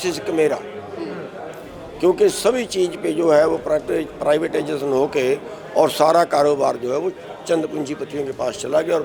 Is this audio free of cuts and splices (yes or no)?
yes